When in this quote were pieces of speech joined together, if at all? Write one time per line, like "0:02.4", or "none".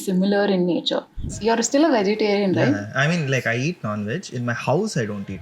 0:01.3